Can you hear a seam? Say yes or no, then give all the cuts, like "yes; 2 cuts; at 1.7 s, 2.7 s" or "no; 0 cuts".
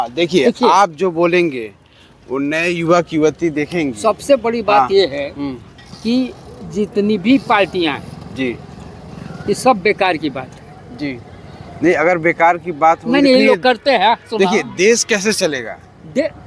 no; 0 cuts